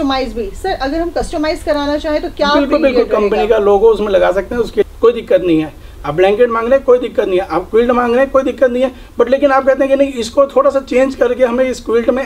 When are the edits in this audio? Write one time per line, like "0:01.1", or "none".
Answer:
0:04.9